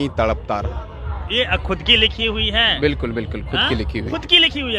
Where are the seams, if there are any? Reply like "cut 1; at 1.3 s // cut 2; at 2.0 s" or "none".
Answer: none